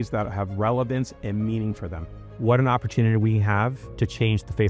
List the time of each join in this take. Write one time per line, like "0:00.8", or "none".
0:02.1